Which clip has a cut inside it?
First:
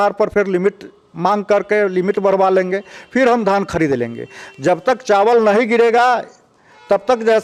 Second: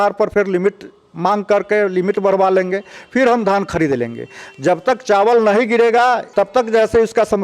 second; 1 cut; at 6.2 s

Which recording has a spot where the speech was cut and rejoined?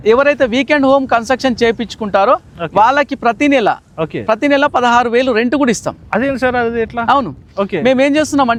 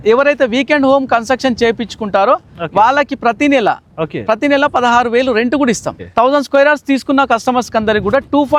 second; 1 cut; at 6.0 s

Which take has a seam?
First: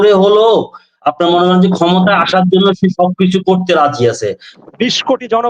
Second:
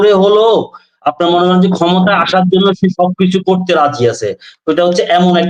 first; 1 cut; at 4.5 s

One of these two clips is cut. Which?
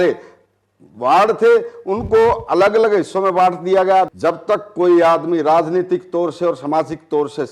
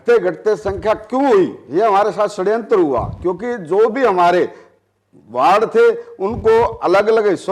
first; 1 cut; at 4.1 s

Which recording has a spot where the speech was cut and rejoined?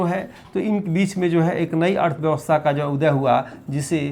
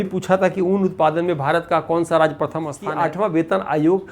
second; 1 cut; at 2.8 s

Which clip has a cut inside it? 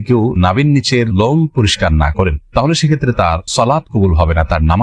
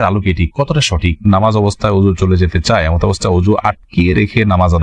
second; 1 cut; at 1.2 s

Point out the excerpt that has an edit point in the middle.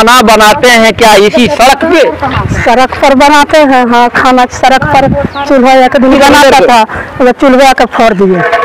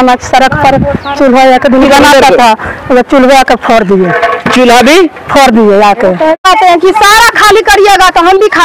second; 1 cut; at 6.4 s

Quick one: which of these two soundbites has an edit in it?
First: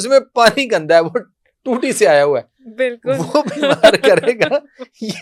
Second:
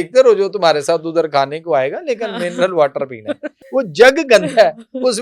second; 1 cut; at 3.5 s

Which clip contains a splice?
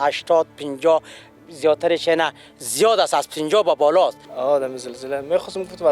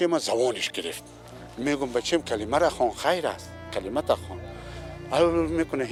first; 1 cut; at 4.3 s

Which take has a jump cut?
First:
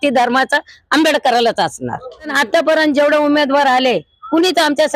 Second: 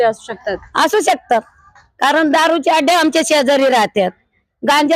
first; 1 cut; at 2.3 s

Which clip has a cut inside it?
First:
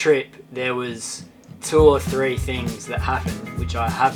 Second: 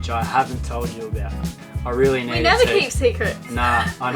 second; 1 cut; at 1.5 s

